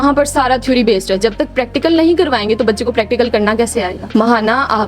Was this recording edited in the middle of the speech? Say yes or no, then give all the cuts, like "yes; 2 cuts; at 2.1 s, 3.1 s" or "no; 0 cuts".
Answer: yes; 1 cut; at 4.0 s